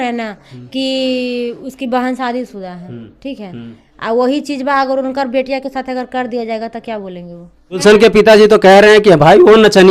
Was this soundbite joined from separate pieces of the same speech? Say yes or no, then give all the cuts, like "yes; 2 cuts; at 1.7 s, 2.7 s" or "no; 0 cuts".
yes; 1 cut; at 7.8 s